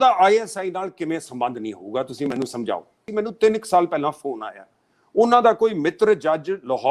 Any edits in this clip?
yes; 1 cut; at 3.0 s

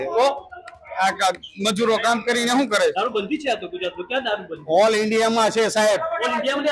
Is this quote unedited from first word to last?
no; 1 cut; at 2.9 s

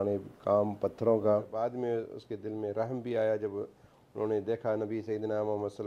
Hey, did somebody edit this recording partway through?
yes; 1 cut; at 1.5 s

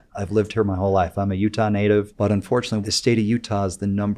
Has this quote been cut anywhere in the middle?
yes; 1 cut; at 2.6 s

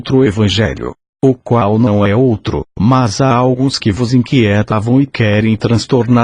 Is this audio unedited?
no; 1 cut; at 1.5 s

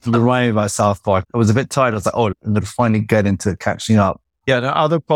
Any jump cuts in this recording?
yes; 3 cuts; at 1.3 s, 2.4 s, 4.3 s

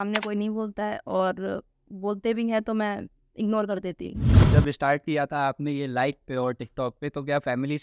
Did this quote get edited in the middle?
yes; 1 cut; at 4.4 s

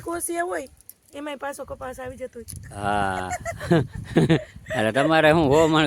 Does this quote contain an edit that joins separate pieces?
no; 0 cuts

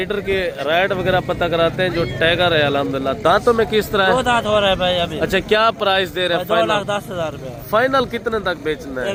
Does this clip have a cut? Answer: no; 0 cuts

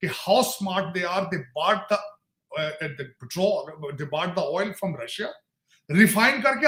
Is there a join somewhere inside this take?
no; 0 cuts

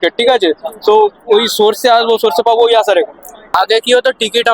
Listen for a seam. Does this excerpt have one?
yes; 1 cut; at 3.4 s

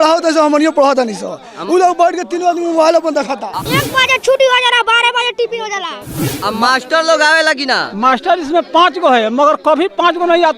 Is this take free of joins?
no; 2 cuts; at 3.5 s, 6.1 s

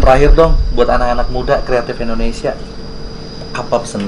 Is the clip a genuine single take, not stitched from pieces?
yes; 0 cuts

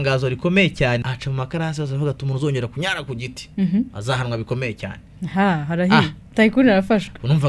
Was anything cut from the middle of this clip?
yes; 1 cut; at 1.1 s

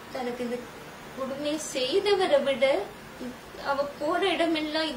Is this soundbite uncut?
yes; 0 cuts

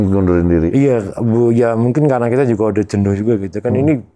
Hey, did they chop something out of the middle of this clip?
no; 0 cuts

